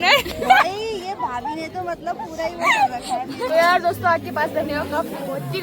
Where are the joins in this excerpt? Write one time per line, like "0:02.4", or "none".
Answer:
0:03.5